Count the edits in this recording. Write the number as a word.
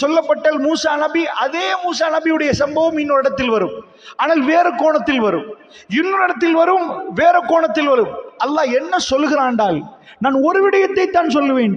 zero